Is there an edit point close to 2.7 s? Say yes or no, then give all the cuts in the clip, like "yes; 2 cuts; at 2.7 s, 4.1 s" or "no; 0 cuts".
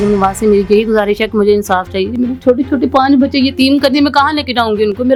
no; 0 cuts